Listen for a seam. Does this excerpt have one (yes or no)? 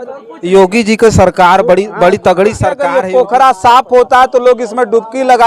yes